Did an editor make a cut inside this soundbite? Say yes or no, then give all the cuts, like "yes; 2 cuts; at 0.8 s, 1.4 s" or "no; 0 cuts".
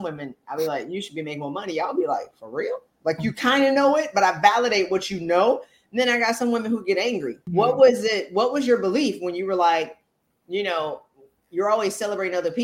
yes; 1 cut; at 7.5 s